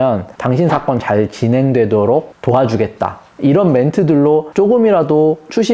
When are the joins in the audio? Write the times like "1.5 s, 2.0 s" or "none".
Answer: 4.5 s